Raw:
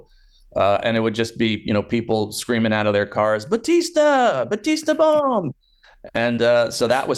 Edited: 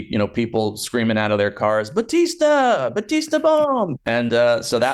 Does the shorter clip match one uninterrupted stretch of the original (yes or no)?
no